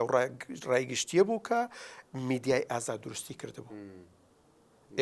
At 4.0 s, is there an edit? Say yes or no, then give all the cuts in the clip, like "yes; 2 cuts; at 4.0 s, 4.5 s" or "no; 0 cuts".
no; 0 cuts